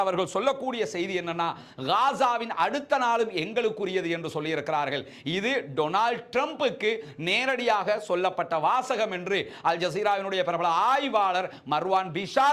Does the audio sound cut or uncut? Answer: uncut